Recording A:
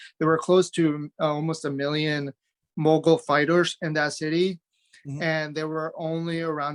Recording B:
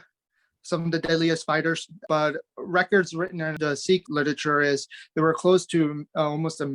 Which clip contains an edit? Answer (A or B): B